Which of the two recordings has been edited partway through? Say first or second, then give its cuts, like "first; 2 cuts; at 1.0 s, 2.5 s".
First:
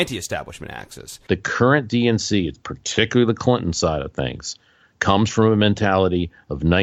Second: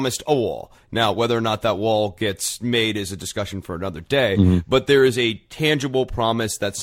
first; 1 cut; at 1.1 s